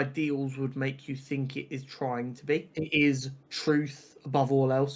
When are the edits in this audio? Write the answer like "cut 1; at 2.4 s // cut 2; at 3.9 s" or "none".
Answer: cut 1; at 2.7 s